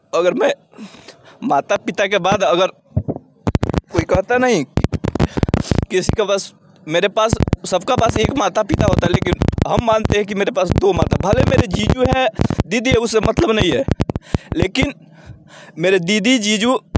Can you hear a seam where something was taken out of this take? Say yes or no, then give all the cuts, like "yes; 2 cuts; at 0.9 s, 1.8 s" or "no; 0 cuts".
yes; 1 cut; at 3.9 s